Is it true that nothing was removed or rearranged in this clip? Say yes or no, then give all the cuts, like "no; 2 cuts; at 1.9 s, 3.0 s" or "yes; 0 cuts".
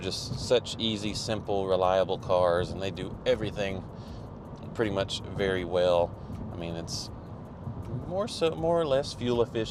yes; 0 cuts